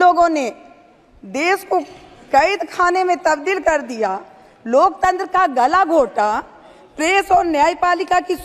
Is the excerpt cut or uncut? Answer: uncut